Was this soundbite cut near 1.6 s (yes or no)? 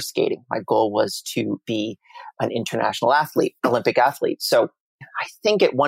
no